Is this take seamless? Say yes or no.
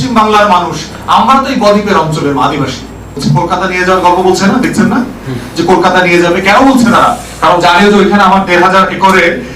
no